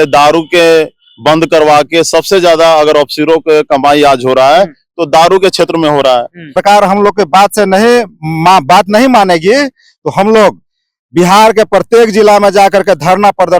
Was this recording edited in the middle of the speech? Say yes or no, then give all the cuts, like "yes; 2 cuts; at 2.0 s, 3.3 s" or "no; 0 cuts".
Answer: yes; 1 cut; at 6.6 s